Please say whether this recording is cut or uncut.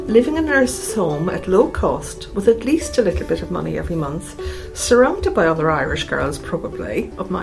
uncut